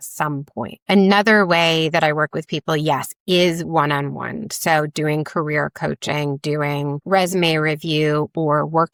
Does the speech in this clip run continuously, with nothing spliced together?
yes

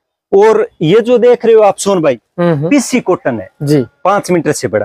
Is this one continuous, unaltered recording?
yes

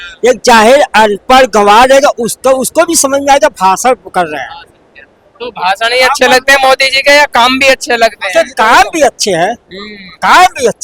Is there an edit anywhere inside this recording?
no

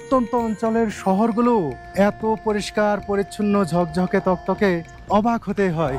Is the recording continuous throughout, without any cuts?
no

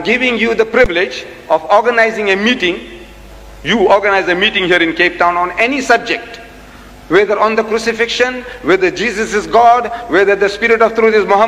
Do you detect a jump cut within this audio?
no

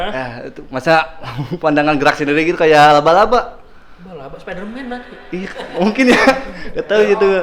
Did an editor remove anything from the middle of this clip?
no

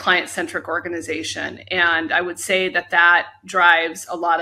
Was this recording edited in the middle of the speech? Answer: no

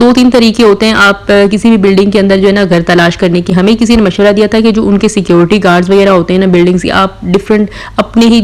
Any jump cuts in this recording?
no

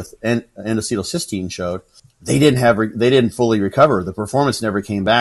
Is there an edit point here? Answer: yes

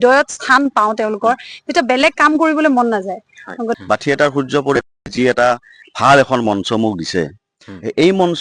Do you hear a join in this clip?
yes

